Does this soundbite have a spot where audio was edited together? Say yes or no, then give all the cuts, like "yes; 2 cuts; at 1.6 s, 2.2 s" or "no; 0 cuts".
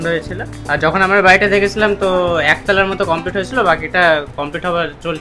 no; 0 cuts